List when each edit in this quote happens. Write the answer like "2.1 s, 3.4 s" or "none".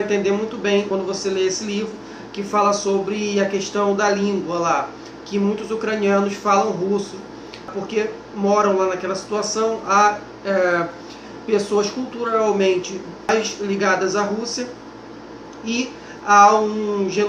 none